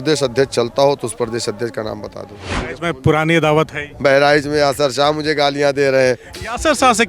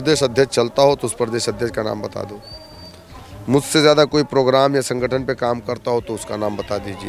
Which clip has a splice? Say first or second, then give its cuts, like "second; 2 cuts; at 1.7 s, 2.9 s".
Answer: first; 1 cut; at 2.7 s